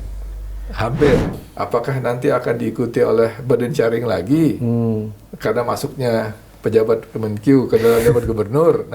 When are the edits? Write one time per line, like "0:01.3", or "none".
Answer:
0:01.4